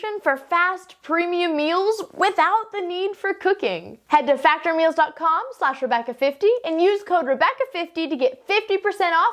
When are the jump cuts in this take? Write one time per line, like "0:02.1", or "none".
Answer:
0:03.9